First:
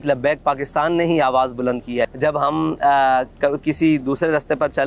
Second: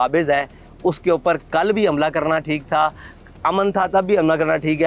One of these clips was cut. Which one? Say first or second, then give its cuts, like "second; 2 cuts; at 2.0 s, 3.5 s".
first; 1 cut; at 2.1 s